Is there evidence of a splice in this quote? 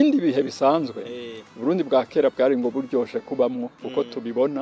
no; 0 cuts

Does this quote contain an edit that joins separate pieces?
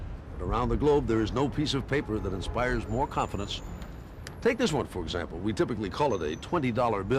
yes; 1 cut; at 5.9 s

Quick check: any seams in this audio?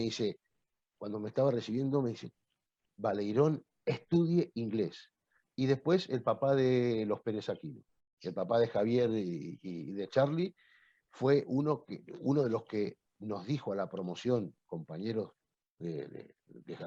no; 0 cuts

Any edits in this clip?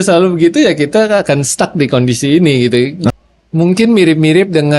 yes; 1 cut; at 3.1 s

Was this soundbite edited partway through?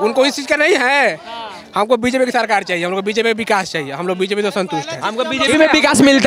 no; 0 cuts

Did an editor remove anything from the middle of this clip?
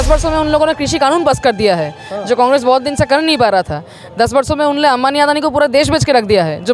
no; 0 cuts

